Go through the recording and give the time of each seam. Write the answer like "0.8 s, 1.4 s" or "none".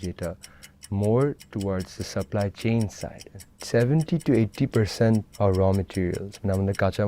3.3 s, 5.3 s